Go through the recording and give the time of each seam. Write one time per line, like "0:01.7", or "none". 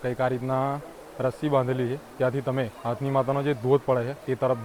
none

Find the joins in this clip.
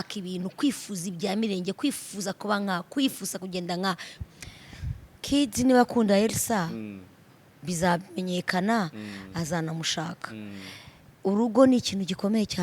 0:04.1

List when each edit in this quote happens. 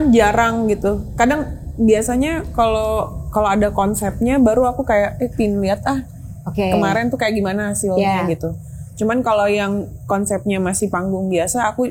none

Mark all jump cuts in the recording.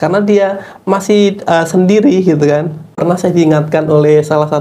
0:03.0

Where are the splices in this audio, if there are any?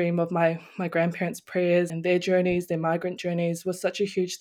0:01.9

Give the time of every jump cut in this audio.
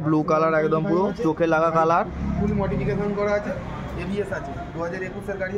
none

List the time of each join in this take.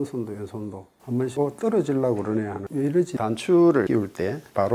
0:03.1
0:03.9

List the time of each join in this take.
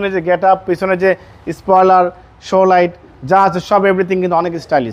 none

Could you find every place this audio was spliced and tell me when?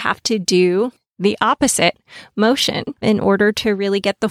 0:01.0
0:02.9

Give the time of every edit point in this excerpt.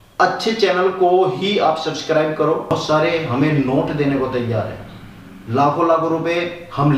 0:02.7

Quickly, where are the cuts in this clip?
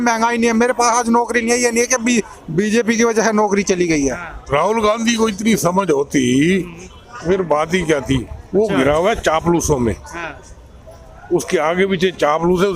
0:04.5

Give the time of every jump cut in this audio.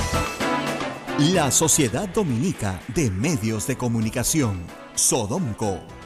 0:01.0

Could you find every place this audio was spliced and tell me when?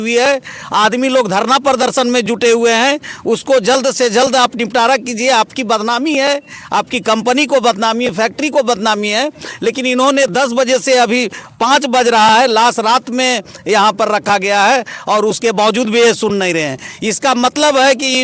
none

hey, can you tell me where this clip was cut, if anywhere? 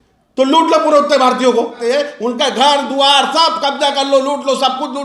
none

